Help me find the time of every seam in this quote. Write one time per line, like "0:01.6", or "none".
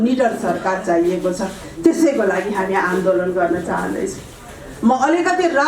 none